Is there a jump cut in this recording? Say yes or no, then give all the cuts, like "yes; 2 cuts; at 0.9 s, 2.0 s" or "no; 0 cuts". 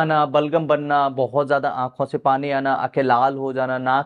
no; 0 cuts